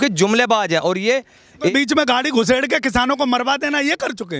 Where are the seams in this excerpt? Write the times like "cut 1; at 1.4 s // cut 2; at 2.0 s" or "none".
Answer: cut 1; at 1.7 s